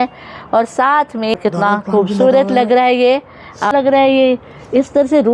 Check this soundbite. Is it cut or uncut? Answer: cut